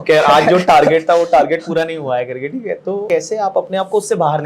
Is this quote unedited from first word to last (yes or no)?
no